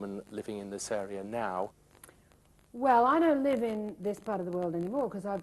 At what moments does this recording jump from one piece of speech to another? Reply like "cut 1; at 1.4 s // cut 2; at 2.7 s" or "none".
cut 1; at 1.1 s